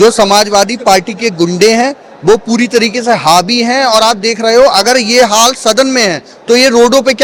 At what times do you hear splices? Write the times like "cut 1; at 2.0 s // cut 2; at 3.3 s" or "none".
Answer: none